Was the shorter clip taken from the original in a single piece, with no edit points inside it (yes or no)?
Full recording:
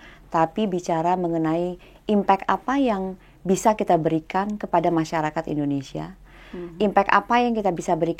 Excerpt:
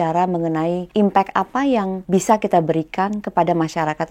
no